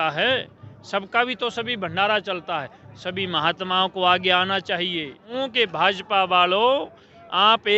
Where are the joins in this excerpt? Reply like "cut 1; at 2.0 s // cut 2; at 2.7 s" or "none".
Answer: cut 1; at 5.3 s